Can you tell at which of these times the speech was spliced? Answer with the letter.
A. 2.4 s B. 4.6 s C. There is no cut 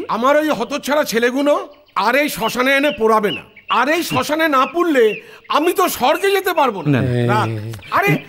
C